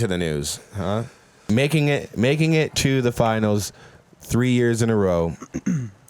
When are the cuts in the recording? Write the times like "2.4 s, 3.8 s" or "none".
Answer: 1.5 s